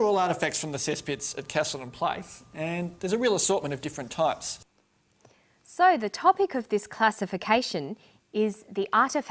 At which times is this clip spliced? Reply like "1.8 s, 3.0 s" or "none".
none